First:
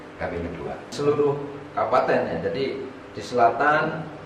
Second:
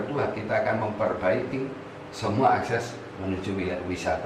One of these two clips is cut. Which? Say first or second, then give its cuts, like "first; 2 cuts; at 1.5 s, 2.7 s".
first; 1 cut; at 0.9 s